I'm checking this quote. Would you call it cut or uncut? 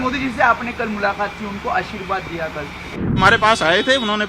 cut